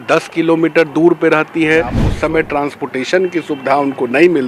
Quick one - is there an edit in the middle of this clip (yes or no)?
yes